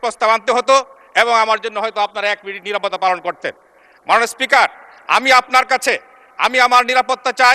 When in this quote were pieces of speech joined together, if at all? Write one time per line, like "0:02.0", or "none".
none